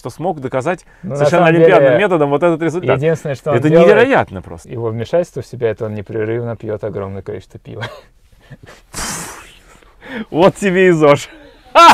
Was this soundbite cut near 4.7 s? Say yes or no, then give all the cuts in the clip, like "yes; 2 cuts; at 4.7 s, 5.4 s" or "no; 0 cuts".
yes; 1 cut; at 4.7 s